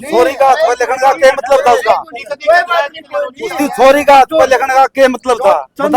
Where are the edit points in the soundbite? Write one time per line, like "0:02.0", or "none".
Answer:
none